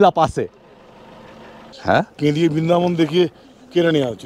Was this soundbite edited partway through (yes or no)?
yes